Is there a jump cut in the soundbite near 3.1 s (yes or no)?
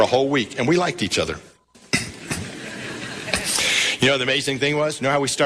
yes